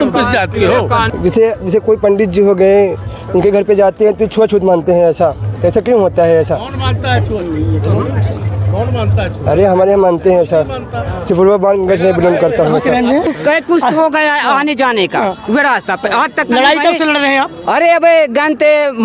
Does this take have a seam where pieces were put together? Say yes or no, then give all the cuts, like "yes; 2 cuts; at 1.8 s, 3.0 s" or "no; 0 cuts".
yes; 2 cuts; at 1.1 s, 13.3 s